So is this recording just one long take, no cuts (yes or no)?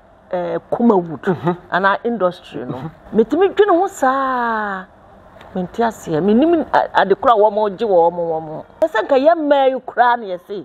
no